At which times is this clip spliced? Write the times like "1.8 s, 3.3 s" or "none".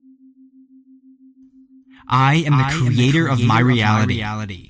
1.8 s